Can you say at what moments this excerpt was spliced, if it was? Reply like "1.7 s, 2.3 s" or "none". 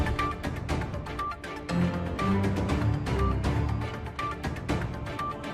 2.7 s